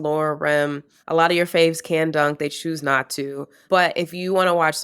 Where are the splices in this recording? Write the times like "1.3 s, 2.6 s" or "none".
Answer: 0.9 s, 3.6 s